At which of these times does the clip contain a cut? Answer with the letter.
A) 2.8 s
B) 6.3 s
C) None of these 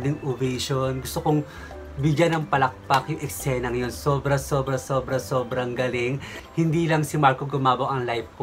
B